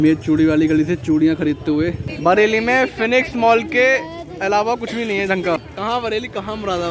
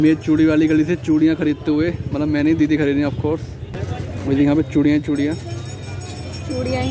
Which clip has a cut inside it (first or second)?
first